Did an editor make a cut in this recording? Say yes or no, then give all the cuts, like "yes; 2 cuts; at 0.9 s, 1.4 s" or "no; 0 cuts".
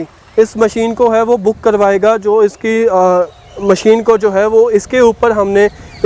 no; 0 cuts